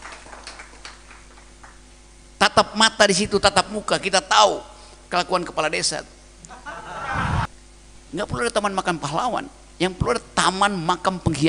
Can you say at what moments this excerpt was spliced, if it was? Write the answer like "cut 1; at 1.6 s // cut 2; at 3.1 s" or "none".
cut 1; at 7.5 s